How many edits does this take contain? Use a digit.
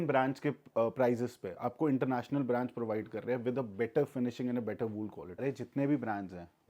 1